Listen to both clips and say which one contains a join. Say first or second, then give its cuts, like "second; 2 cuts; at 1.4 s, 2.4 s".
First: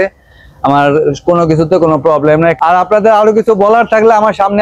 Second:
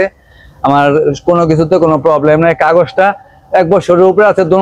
first; 1 cut; at 2.6 s